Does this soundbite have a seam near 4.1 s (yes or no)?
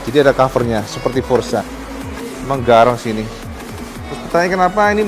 no